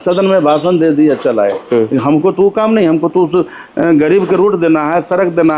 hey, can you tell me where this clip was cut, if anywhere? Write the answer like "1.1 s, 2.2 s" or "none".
none